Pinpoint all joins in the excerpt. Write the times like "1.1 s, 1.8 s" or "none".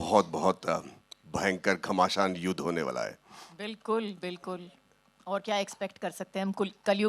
none